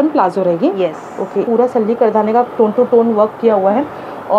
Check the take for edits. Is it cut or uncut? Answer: cut